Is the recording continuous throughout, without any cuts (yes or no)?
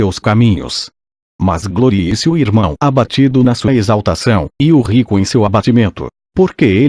yes